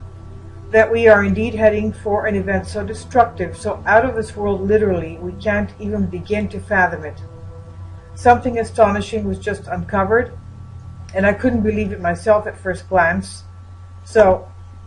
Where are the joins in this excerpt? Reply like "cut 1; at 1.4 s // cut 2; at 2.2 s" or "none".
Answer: cut 1; at 12.5 s